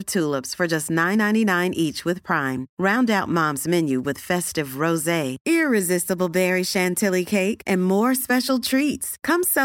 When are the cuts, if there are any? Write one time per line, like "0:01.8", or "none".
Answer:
none